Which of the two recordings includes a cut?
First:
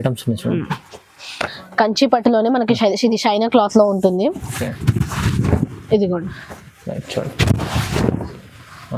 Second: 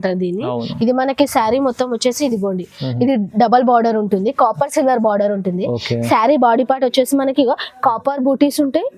first; 1 cut; at 1.6 s

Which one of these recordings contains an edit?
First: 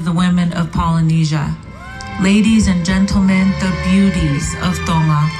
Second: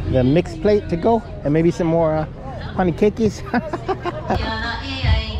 second; 1 cut; at 4.3 s

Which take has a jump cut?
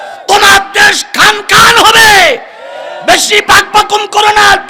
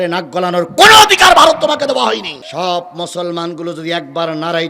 second; 1 cut; at 2.4 s

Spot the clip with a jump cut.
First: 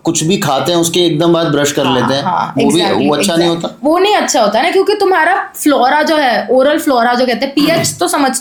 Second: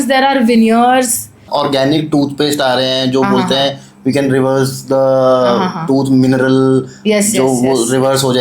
second; 1 cut; at 1.4 s

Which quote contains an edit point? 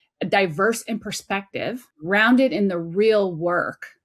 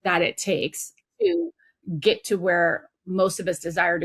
first; 1 cut; at 1.9 s

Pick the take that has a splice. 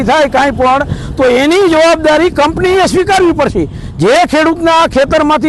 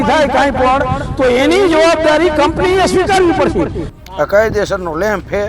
second; 1 cut; at 3.8 s

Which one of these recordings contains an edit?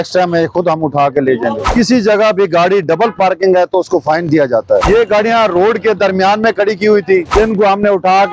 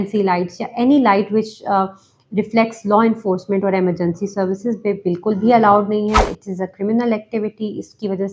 first; 3 cuts; at 1.6 s, 4.9 s, 7.3 s

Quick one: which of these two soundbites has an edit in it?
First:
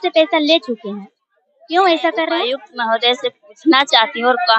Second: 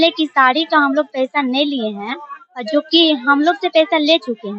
first; 1 cut; at 2.6 s

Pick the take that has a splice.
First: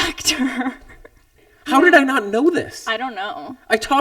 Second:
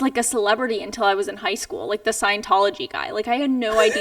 first; 1 cut; at 1.4 s

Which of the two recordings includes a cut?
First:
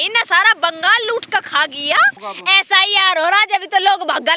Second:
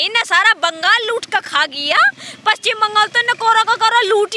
first; 1 cut; at 2.2 s

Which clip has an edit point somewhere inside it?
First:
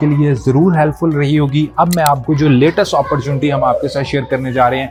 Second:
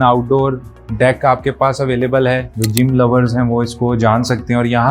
second; 1 cut; at 2.5 s

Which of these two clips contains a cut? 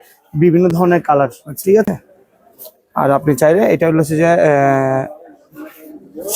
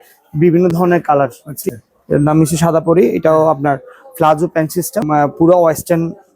second; 2 cuts; at 1.5 s, 5.0 s

